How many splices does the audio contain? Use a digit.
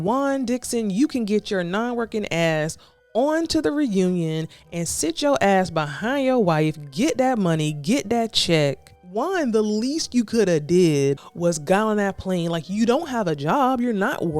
2